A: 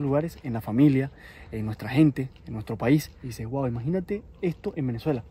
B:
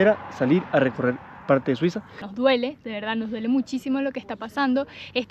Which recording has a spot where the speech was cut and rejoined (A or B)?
B